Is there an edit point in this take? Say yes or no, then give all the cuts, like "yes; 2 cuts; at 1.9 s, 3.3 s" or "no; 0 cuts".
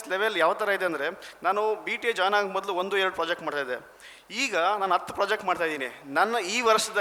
no; 0 cuts